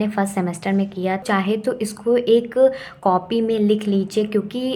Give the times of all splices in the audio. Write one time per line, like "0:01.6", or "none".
0:01.2